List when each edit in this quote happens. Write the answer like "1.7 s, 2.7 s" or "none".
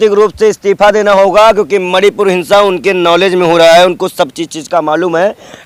none